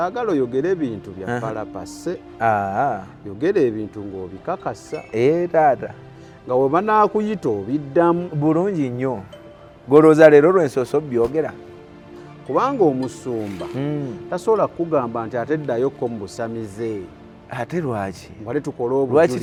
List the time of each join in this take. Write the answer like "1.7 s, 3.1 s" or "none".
none

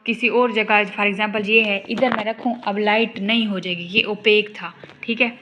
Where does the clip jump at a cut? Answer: none

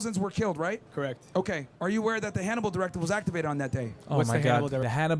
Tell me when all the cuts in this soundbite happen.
none

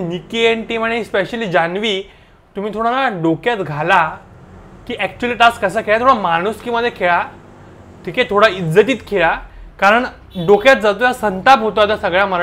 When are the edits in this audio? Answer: none

